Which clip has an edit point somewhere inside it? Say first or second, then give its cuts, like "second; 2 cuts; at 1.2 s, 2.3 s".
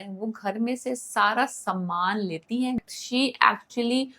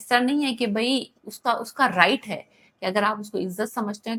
first; 1 cut; at 2.8 s